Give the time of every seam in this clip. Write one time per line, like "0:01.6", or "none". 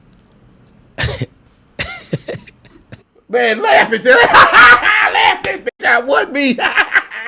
none